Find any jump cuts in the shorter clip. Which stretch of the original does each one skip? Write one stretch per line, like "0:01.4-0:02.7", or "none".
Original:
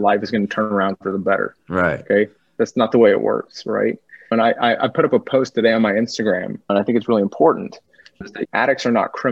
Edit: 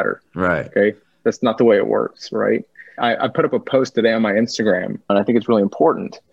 0:04.3-0:04.5